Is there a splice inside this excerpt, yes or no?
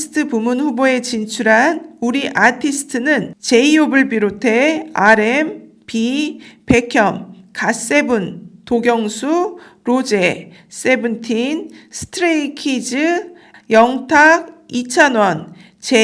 no